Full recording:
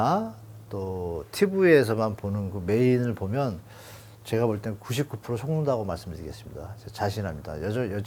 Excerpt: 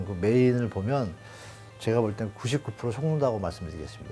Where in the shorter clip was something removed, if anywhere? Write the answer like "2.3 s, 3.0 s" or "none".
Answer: none